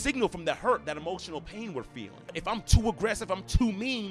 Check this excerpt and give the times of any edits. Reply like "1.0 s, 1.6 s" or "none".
2.3 s